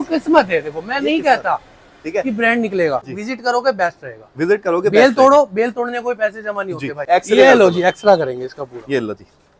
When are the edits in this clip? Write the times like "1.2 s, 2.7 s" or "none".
3.0 s, 7.0 s